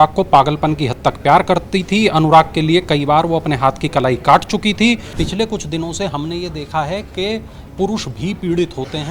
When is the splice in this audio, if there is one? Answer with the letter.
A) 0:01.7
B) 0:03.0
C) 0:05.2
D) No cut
C